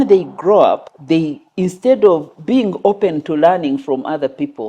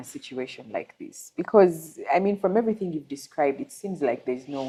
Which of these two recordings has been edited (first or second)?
first